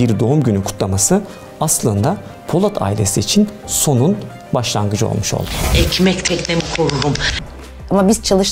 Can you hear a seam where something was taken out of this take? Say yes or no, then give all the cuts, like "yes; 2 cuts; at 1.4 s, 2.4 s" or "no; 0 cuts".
yes; 2 cuts; at 5.6 s, 7.3 s